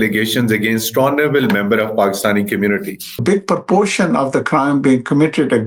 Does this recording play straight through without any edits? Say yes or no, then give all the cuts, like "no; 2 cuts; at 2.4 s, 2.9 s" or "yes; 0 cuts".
no; 1 cut; at 3.2 s